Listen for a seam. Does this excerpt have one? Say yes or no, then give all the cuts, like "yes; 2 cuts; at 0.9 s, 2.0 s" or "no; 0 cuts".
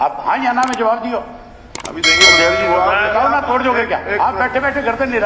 no; 0 cuts